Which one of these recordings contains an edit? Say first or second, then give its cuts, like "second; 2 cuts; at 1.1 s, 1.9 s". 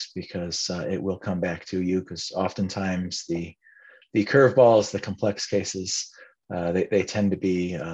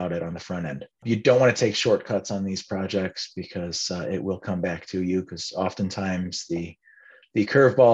second; 1 cut; at 1.0 s